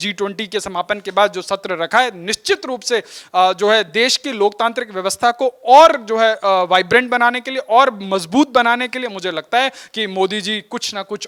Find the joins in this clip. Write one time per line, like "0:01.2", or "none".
none